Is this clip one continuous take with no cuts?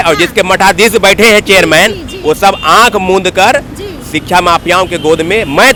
yes; 0 cuts

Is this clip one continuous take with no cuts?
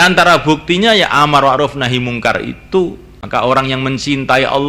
no; 1 cut; at 3.1 s

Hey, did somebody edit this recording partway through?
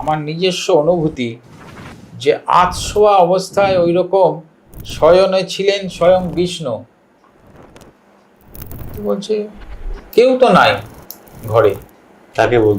yes; 1 cut; at 8.8 s

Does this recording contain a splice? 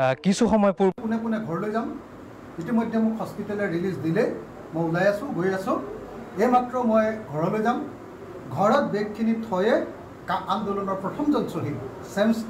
yes; 1 cut; at 0.9 s

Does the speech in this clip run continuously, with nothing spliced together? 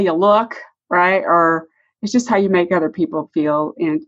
yes; 0 cuts

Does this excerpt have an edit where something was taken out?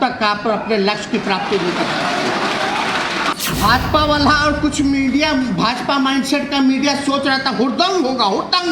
yes; 1 cut; at 3.3 s

